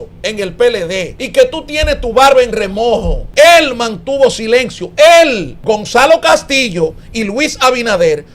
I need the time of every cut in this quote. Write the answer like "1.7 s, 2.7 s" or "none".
1.2 s, 3.2 s, 5.5 s

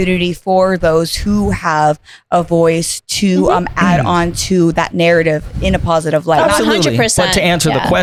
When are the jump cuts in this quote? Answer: none

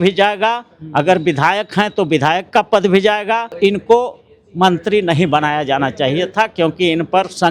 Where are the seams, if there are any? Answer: 3.5 s

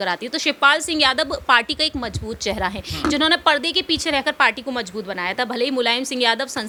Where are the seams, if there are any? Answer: none

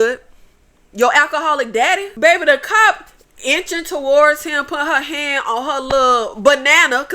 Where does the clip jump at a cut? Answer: 2.1 s

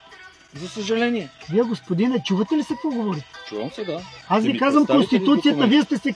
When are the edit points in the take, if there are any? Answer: 1.4 s, 4.1 s

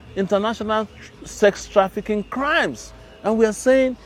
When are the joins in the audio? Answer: none

